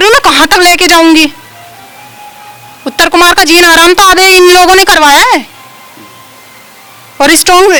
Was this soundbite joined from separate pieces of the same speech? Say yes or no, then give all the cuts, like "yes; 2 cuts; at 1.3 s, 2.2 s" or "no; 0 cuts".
no; 0 cuts